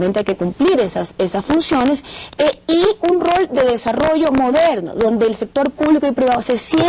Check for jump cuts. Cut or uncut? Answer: cut